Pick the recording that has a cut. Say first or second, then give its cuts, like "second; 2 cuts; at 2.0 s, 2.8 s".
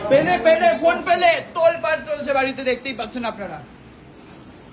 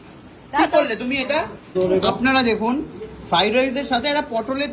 second; 1 cut; at 1.6 s